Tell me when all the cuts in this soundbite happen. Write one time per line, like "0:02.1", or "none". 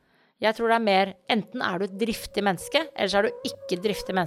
none